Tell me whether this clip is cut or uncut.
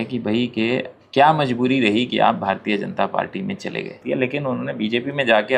cut